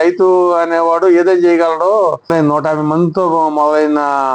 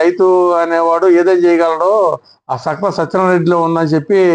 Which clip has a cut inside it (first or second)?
first